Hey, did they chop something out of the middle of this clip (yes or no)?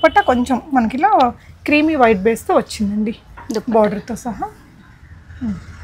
no